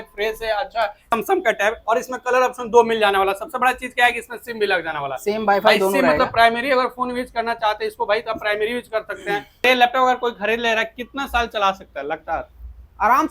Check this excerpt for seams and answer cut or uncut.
cut